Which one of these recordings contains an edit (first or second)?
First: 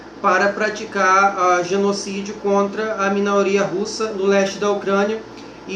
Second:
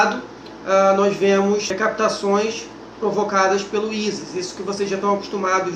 first